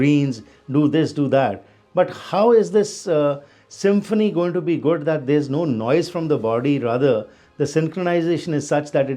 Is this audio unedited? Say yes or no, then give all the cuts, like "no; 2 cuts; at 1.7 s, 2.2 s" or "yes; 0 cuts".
yes; 0 cuts